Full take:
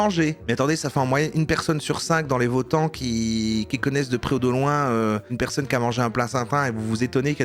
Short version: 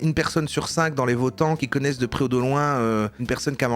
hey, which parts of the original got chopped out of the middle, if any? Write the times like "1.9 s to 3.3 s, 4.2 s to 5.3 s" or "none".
3.0 s to 3.7 s